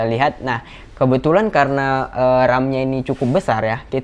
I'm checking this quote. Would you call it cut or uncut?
uncut